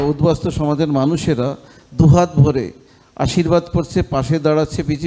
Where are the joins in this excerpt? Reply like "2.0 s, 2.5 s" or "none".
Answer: none